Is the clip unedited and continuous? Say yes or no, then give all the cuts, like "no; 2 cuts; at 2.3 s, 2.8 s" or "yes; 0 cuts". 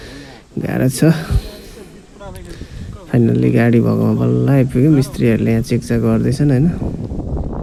yes; 0 cuts